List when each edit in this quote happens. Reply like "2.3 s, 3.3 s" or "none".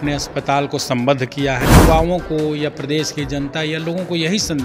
1.8 s